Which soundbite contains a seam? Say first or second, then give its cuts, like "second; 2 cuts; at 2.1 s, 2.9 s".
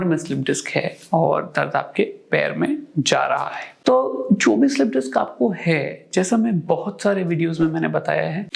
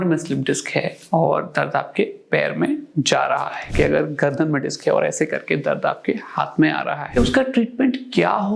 second; 2 cuts; at 3.7 s, 7.2 s